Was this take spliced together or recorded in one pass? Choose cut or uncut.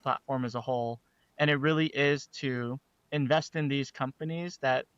uncut